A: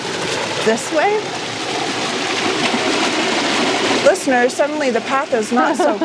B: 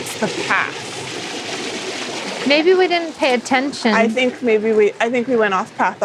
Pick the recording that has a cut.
A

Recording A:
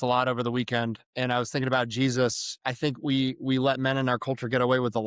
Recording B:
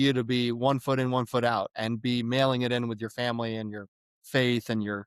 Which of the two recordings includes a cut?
A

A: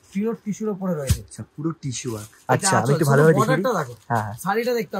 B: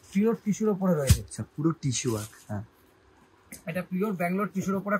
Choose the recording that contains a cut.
A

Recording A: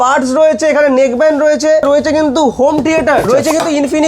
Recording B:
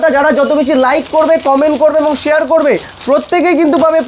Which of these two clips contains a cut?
A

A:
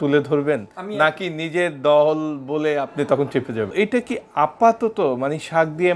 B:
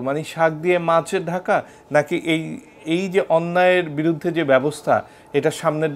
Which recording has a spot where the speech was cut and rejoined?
A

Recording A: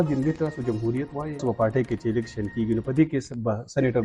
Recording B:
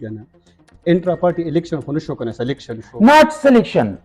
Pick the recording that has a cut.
A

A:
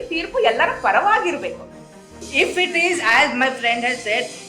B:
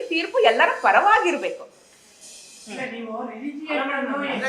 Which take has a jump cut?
A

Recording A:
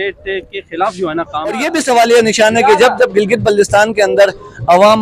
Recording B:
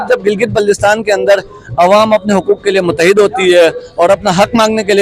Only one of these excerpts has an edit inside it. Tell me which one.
A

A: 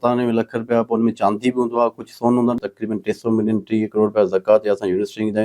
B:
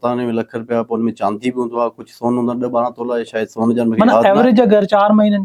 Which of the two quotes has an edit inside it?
A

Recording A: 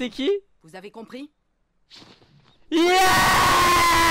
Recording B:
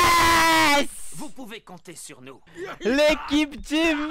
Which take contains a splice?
B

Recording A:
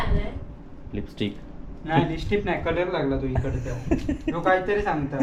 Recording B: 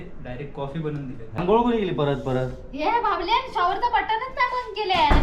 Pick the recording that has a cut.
B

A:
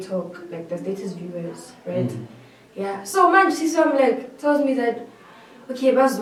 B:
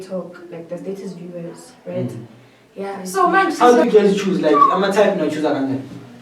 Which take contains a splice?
B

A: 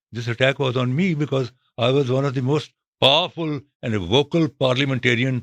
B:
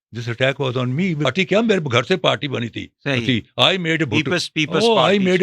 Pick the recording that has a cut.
B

